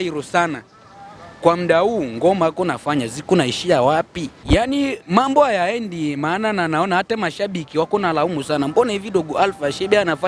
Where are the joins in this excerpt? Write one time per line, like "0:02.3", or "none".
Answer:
0:04.4